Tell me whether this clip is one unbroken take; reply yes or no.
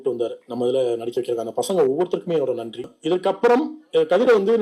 no